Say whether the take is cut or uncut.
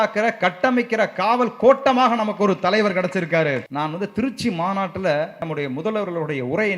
cut